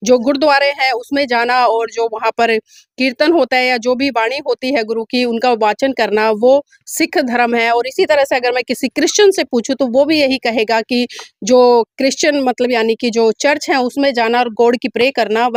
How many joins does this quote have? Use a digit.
0